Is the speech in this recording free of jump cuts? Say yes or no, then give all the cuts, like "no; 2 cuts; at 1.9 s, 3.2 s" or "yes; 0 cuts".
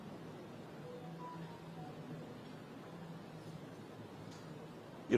yes; 0 cuts